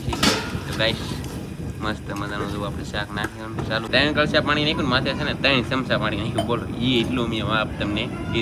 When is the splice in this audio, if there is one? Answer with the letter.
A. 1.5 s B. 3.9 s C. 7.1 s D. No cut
B